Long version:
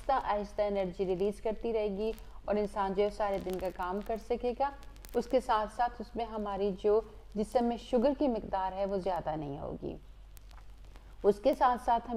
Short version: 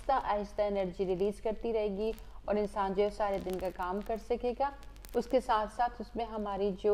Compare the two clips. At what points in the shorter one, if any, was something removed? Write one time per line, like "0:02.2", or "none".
none

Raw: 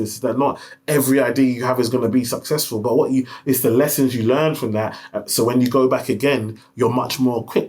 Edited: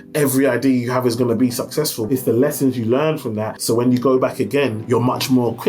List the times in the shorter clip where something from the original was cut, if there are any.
0:02.0
0:03.5
0:04.8

